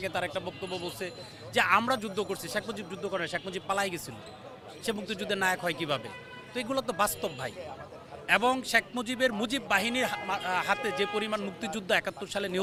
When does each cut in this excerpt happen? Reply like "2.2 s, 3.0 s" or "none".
none